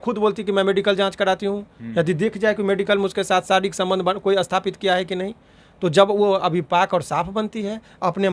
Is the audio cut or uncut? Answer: uncut